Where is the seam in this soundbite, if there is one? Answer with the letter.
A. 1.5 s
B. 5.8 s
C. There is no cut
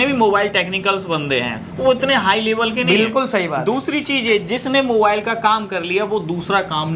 C